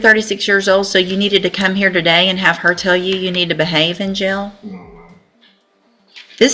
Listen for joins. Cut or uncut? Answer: uncut